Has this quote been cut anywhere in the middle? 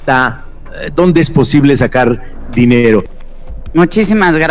yes; 1 cut; at 3.1 s

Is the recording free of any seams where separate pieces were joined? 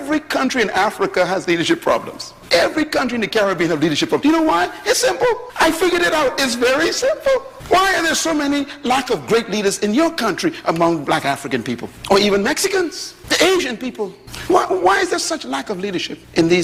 yes; 0 cuts

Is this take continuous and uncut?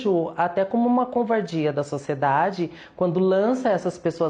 yes; 0 cuts

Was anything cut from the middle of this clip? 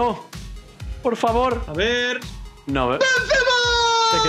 yes; 1 cut; at 2.3 s

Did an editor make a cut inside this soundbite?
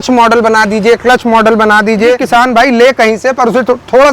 yes; 1 cut; at 2.2 s

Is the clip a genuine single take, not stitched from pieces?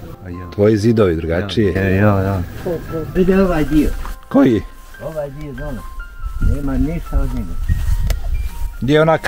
no; 1 cut; at 3.1 s

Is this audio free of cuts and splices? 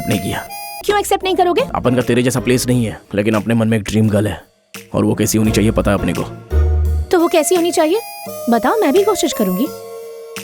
no; 3 cuts; at 0.8 s, 1.7 s, 3.0 s

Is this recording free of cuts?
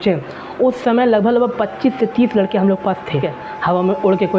no; 1 cut; at 3.4 s

